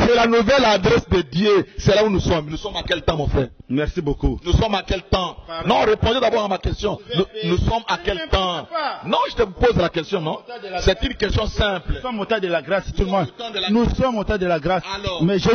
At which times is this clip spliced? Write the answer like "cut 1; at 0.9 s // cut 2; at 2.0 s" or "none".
none